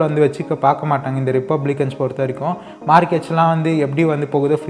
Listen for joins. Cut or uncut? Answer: uncut